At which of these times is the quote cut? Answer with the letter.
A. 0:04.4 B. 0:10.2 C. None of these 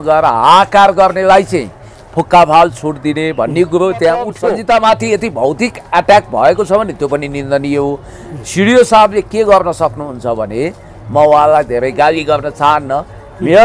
A